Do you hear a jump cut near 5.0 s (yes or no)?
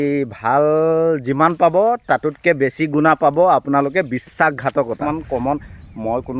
yes